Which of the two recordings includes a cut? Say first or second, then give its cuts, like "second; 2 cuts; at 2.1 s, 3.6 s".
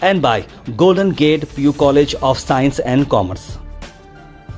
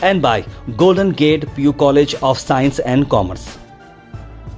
first; 1 cut; at 3.7 s